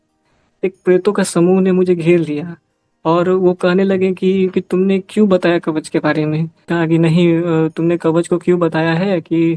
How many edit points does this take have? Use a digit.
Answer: 1